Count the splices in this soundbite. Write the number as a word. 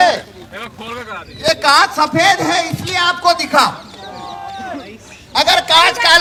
zero